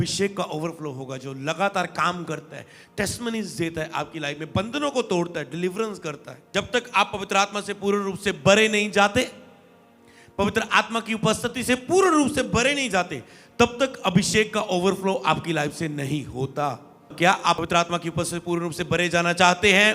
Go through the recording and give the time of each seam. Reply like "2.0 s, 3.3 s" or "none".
17.1 s

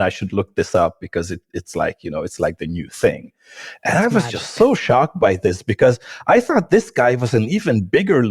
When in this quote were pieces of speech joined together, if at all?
none

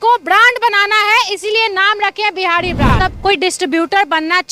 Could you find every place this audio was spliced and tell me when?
2.9 s

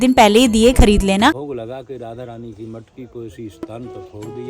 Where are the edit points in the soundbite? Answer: 1.5 s

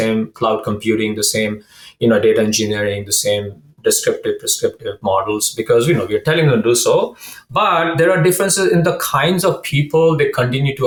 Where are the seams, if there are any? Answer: none

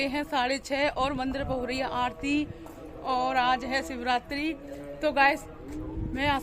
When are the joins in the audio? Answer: none

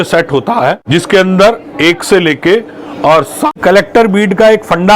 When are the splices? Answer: 0.8 s, 3.5 s

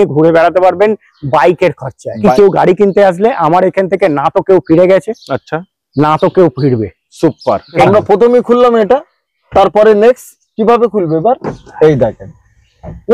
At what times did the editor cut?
2.2 s, 7.8 s

